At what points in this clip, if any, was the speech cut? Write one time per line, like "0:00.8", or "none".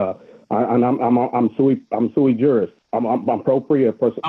0:02.8